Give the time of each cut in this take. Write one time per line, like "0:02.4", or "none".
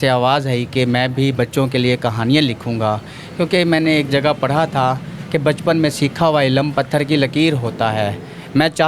none